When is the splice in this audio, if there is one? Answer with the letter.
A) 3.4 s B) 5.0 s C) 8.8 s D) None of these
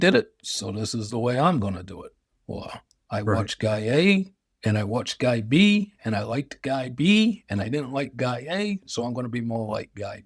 D